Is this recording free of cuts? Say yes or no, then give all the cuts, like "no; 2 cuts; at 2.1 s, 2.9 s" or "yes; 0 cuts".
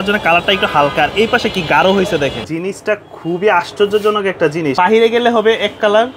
no; 2 cuts; at 2.5 s, 4.7 s